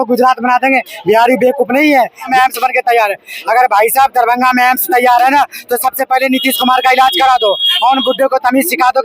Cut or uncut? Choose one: cut